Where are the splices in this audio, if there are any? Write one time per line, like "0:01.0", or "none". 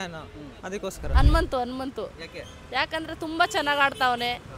0:01.0